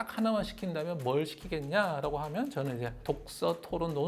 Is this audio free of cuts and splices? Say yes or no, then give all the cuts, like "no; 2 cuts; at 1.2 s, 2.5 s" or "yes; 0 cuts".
no; 1 cut; at 3.0 s